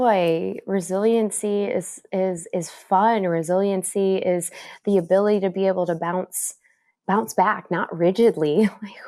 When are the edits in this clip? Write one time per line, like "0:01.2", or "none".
none